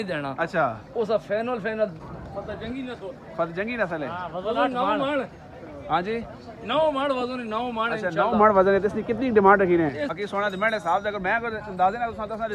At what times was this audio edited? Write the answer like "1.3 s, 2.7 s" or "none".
2.0 s, 10.1 s